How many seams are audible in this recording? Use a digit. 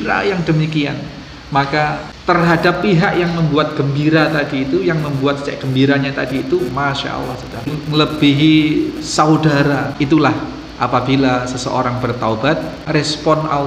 4